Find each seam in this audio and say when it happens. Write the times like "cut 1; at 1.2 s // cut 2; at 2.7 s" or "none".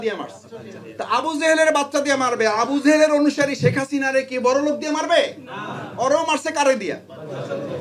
none